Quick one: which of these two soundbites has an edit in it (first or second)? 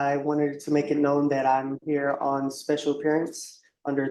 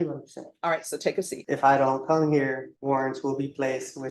second